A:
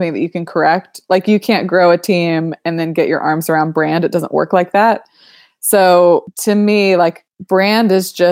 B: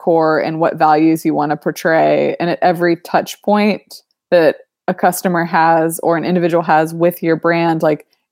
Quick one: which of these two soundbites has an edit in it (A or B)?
A